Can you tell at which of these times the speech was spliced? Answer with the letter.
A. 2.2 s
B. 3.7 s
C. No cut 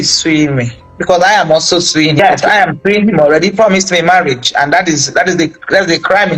A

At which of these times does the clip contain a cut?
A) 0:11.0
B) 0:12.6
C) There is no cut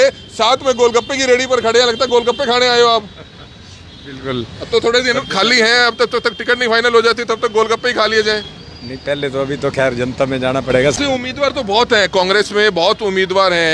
A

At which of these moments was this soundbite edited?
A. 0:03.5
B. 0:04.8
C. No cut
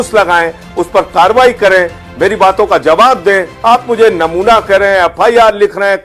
A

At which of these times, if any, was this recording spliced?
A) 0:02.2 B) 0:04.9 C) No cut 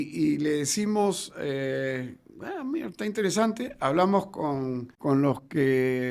B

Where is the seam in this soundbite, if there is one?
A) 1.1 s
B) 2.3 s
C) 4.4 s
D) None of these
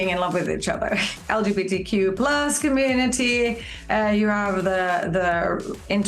A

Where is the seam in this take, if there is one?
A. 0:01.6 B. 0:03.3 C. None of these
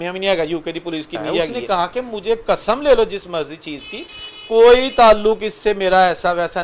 A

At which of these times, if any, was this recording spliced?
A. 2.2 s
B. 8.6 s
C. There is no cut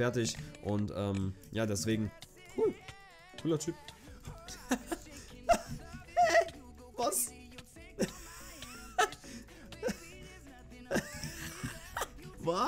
A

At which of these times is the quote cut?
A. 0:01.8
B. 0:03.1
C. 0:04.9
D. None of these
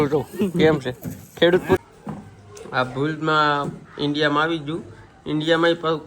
A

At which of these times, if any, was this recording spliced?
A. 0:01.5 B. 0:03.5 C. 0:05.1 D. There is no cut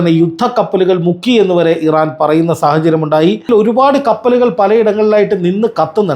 B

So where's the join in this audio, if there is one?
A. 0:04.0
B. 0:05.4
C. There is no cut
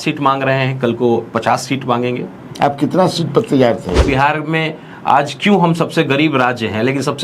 A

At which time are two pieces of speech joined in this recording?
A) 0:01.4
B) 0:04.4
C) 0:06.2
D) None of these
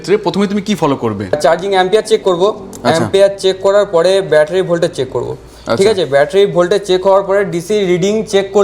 A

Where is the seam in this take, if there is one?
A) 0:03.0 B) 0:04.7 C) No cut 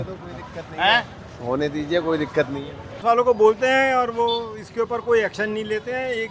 A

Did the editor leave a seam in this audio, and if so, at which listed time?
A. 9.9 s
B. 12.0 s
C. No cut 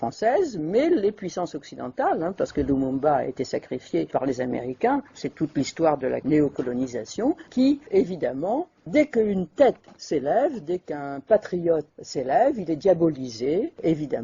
A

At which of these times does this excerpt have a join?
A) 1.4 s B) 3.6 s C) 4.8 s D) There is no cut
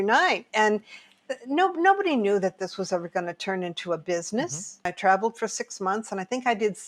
C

